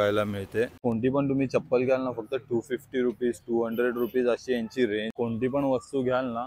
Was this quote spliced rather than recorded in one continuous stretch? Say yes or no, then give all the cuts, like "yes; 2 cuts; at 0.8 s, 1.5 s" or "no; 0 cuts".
yes; 2 cuts; at 0.8 s, 5.1 s